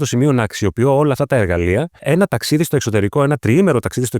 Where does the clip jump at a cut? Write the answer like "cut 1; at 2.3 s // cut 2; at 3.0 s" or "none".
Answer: cut 1; at 1.9 s